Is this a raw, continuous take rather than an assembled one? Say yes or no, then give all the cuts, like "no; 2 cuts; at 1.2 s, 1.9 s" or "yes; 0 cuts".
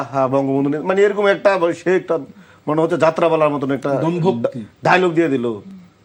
yes; 0 cuts